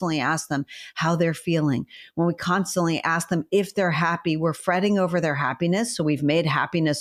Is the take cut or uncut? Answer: uncut